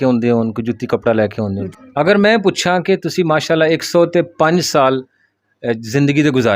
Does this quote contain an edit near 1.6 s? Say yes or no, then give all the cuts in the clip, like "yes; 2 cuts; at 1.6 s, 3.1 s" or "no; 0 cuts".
yes; 1 cut; at 1.6 s